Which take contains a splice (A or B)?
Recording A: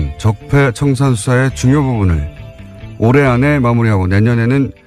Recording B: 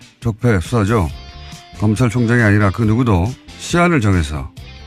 B